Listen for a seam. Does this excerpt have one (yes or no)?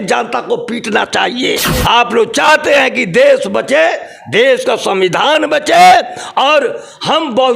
yes